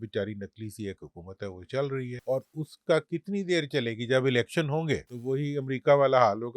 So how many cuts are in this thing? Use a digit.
2